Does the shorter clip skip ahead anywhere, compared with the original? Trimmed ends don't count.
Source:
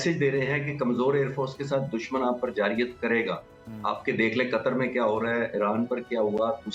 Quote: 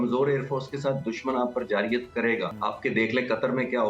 yes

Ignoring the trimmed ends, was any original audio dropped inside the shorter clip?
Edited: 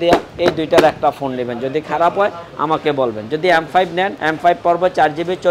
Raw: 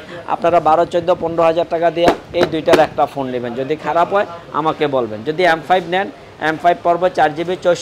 yes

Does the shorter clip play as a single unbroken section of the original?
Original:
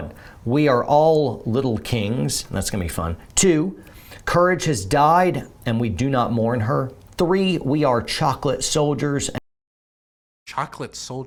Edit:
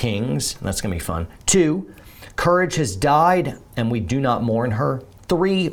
yes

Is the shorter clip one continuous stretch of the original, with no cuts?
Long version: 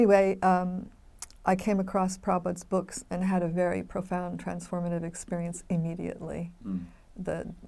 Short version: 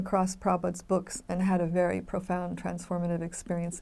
yes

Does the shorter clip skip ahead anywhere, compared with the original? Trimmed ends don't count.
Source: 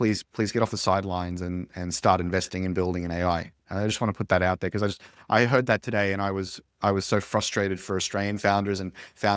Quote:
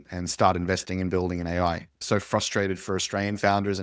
yes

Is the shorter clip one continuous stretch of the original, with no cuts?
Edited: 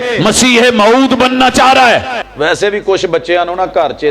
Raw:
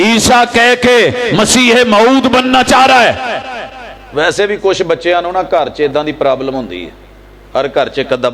no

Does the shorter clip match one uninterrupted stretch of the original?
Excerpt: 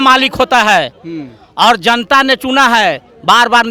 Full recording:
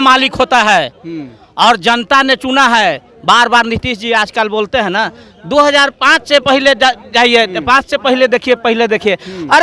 yes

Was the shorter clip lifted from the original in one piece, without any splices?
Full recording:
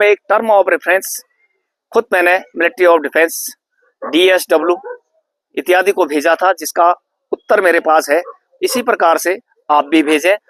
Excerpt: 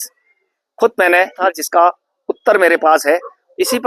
no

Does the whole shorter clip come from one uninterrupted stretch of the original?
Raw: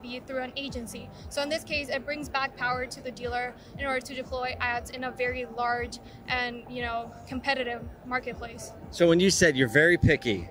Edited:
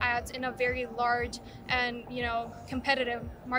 yes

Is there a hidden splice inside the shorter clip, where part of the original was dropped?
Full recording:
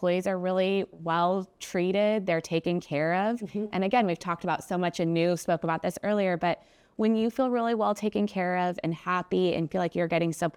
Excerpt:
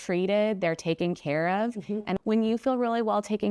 yes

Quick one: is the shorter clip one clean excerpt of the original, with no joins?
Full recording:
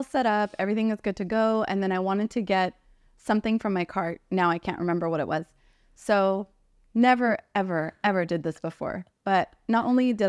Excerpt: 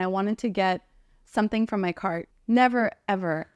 no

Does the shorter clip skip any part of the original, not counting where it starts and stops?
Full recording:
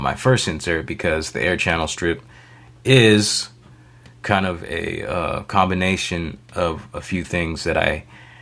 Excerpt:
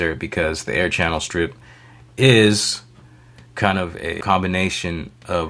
yes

